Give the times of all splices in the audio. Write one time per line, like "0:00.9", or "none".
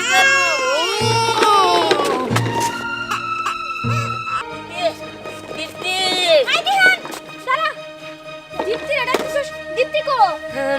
0:04.4